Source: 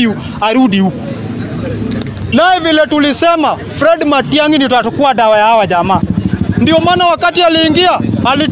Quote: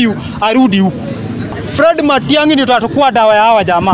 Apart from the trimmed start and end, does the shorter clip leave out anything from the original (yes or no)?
yes